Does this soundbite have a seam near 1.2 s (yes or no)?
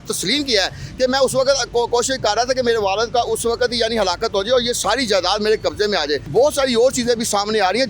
no